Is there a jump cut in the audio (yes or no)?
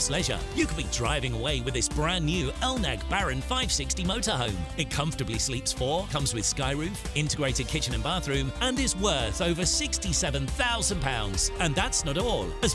no